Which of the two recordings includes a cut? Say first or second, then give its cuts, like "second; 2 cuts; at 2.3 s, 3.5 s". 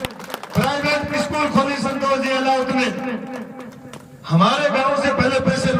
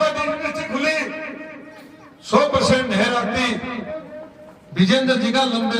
second; 1 cut; at 3.9 s